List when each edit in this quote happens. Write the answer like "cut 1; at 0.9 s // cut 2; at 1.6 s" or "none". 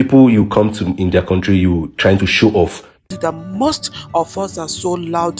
cut 1; at 3.1 s